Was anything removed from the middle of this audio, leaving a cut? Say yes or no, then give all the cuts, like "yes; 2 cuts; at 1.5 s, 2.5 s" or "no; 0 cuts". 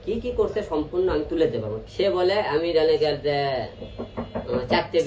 yes; 1 cut; at 1.8 s